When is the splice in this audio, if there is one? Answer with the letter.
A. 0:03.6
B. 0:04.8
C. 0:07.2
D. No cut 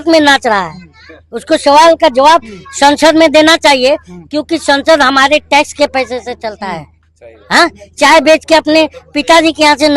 D